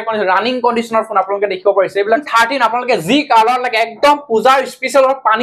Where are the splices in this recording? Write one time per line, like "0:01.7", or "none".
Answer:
0:02.2